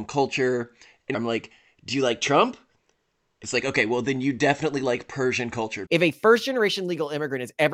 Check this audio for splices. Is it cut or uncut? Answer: cut